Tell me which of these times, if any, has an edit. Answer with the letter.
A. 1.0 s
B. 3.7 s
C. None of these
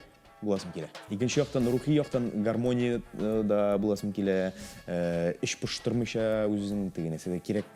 A